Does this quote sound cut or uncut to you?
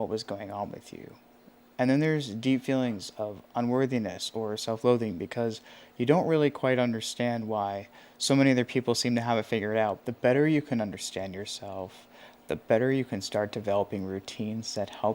cut